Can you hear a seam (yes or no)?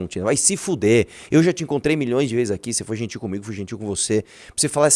no